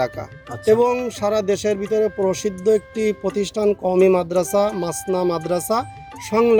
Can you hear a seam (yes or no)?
no